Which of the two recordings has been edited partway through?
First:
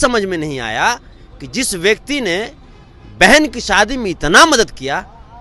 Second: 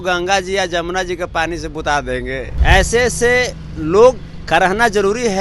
second; 1 cut; at 2.5 s

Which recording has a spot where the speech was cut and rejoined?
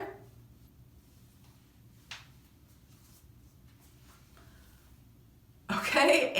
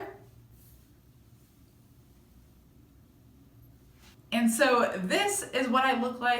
second; 2 cuts; at 1.0 s, 4.1 s

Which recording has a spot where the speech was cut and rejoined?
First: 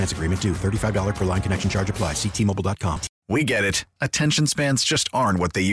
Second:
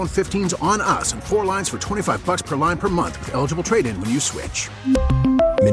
first; 1 cut; at 3.1 s

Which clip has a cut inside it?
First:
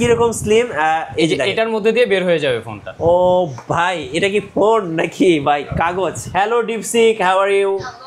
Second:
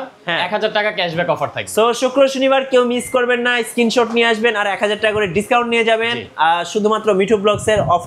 first; 1 cut; at 6.2 s

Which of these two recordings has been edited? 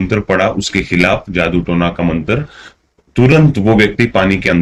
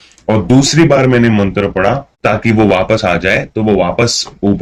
second; 1 cut; at 2.1 s

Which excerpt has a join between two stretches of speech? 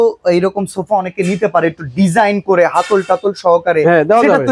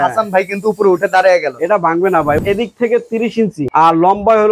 second; 2 cuts; at 2.4 s, 3.6 s

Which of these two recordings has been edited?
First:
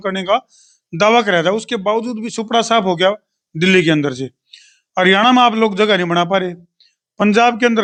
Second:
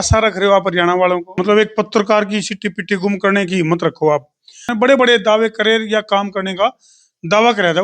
second; 2 cuts; at 1.4 s, 4.6 s

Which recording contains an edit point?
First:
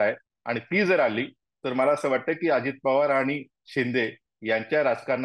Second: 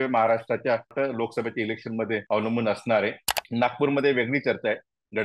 second; 3 cuts; at 0.9 s, 2.2 s, 3.3 s

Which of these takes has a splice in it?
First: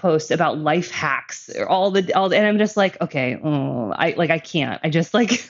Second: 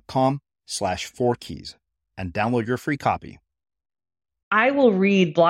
second; 1 cut; at 4.3 s

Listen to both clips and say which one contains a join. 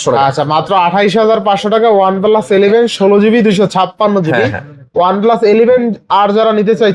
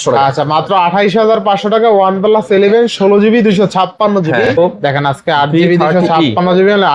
second; 1 cut; at 4.6 s

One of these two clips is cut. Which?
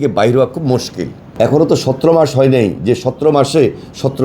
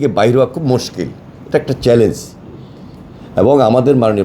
first; 1 cut; at 1.2 s

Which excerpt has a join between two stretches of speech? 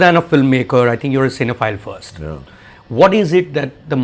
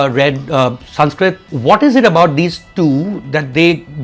second; 1 cut; at 1.5 s

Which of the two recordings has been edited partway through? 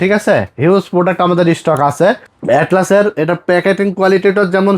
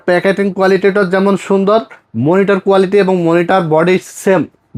first; 1 cut; at 2.3 s

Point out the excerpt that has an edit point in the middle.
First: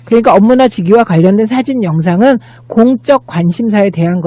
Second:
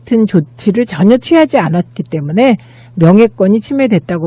second; 1 cut; at 3.2 s

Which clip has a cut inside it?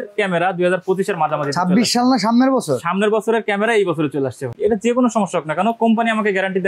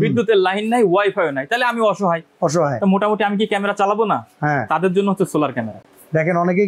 first; 1 cut; at 4.5 s

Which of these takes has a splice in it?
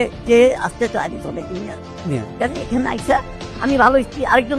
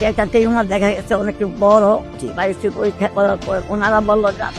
second; 2 cuts; at 2.1 s, 3.6 s

